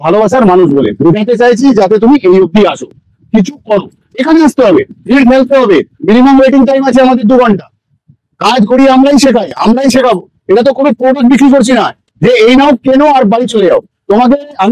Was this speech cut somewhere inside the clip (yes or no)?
no